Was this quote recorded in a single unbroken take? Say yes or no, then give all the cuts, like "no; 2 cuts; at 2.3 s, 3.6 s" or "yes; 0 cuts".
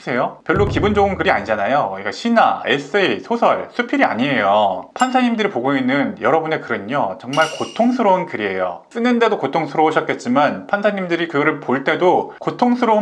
yes; 0 cuts